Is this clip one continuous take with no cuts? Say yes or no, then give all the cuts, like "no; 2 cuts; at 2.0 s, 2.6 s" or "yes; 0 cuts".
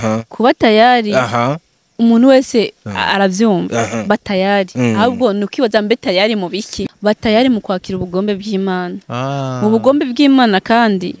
no; 1 cut; at 6.7 s